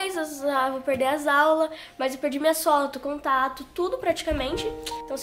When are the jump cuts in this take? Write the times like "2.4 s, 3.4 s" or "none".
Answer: none